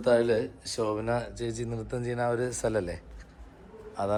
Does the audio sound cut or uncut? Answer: uncut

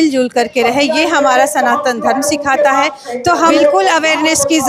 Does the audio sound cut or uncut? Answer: cut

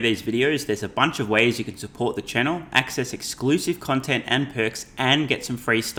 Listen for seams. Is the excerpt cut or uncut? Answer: uncut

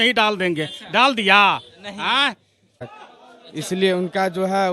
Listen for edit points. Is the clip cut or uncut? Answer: cut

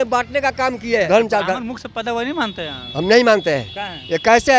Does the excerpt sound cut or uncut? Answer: cut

